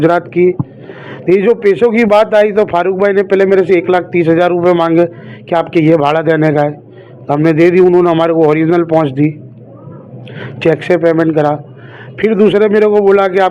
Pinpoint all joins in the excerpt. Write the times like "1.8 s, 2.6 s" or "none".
none